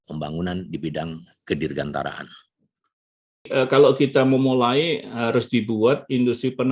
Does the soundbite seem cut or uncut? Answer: cut